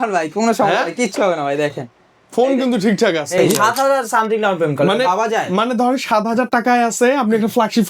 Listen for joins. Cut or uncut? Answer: cut